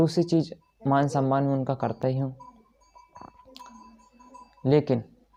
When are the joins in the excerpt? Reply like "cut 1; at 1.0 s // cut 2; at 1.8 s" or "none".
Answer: none